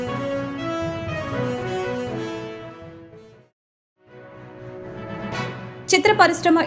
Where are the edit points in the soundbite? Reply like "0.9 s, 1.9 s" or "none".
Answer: none